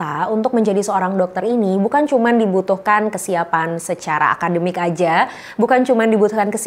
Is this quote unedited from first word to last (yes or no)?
yes